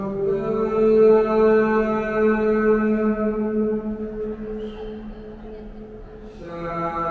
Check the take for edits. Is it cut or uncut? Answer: uncut